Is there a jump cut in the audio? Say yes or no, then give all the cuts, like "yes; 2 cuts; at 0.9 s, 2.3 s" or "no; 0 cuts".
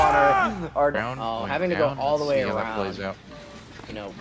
yes; 1 cut; at 1.0 s